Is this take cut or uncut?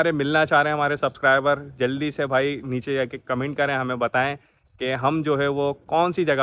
uncut